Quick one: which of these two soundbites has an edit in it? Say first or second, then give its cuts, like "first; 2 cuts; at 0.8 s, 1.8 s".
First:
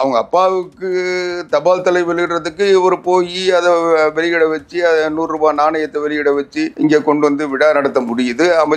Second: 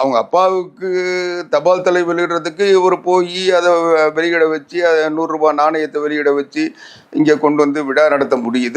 first; 1 cut; at 6.7 s